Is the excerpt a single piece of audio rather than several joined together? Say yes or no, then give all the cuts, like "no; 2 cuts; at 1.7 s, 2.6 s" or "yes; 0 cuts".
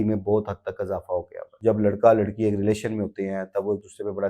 no; 1 cut; at 1.4 s